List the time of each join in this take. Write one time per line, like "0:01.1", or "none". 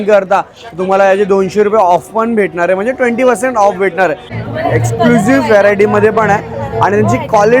0:04.3